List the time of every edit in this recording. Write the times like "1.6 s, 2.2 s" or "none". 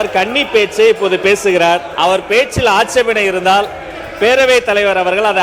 1.9 s